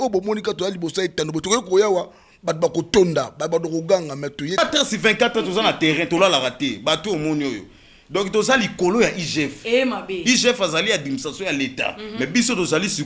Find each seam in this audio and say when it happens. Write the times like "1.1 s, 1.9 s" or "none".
4.6 s